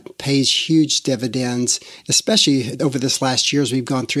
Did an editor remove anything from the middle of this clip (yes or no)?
yes